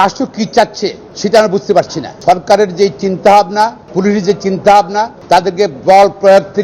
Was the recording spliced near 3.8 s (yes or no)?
yes